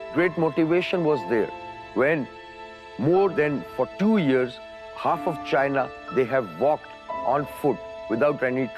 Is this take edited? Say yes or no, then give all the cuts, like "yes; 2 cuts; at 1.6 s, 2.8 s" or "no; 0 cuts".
no; 0 cuts